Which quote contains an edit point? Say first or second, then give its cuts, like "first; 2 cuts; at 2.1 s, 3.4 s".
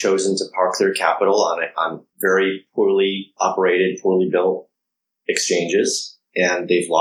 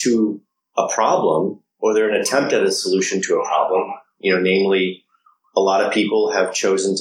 first; 2 cuts; at 2.0 s, 3.3 s